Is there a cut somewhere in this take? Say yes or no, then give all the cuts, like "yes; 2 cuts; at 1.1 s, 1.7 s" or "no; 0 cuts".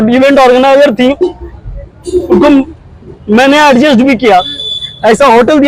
no; 0 cuts